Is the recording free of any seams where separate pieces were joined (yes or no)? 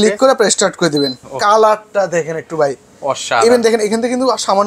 no